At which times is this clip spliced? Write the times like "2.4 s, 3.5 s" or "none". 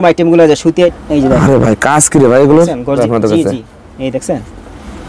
0.9 s, 3.0 s